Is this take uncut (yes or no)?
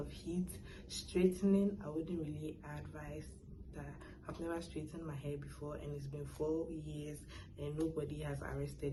yes